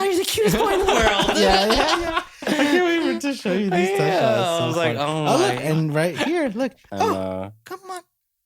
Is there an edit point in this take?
no; 0 cuts

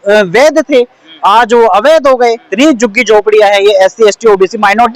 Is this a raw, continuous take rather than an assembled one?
no; 1 cut; at 2.5 s

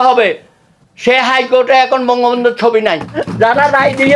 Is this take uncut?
no; 1 cut; at 3.2 s

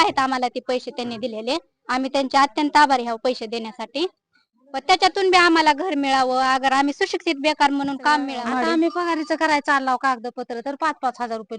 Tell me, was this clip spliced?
yes; 1 cut; at 8.4 s

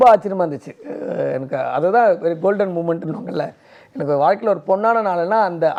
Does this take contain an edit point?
no; 0 cuts

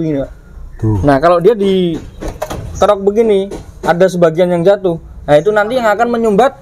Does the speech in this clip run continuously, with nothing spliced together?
yes; 0 cuts

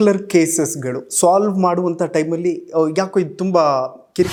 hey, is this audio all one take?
yes; 0 cuts

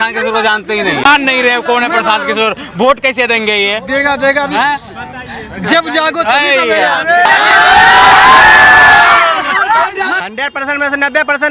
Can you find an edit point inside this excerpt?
yes; 3 cuts; at 1.0 s, 7.2 s, 10.1 s

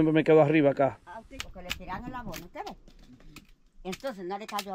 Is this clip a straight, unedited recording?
no; 1 cut; at 1.3 s

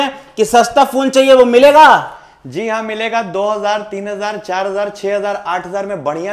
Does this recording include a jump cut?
no; 0 cuts

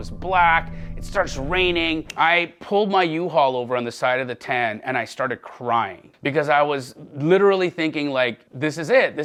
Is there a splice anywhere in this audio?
no; 0 cuts

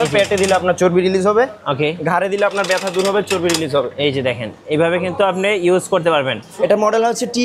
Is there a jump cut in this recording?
yes; 1 cut; at 6.4 s

